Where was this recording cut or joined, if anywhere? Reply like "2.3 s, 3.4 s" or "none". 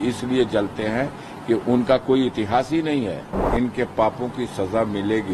3.4 s